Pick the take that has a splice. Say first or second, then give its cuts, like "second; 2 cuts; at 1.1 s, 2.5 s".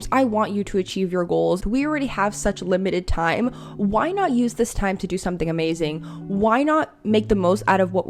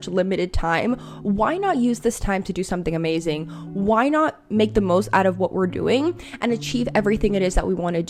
first; 1 cut; at 1.6 s